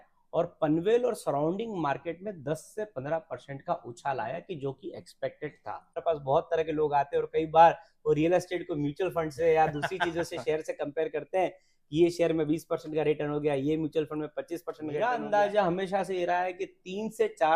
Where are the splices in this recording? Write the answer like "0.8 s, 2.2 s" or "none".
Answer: 6.0 s, 15.0 s